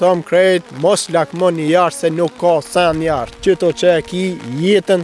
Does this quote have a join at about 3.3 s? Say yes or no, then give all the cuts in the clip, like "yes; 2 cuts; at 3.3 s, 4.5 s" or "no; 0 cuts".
yes; 1 cut; at 3.3 s